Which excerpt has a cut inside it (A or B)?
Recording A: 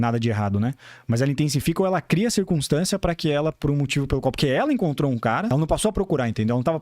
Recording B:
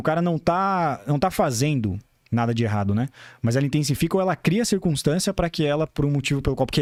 A